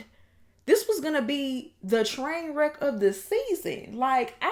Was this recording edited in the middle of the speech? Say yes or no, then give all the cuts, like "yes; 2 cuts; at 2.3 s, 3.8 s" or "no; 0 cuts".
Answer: no; 0 cuts